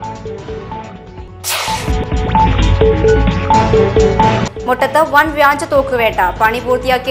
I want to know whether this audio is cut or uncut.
cut